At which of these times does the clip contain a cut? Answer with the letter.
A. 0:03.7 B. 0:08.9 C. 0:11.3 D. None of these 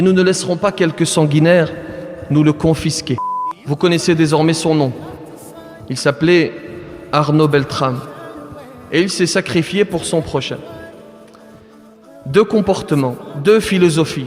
A